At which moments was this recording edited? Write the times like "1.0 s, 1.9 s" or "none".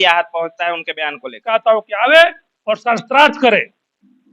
1.5 s